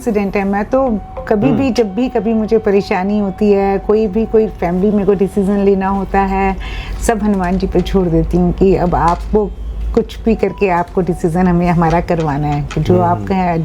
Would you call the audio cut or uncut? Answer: uncut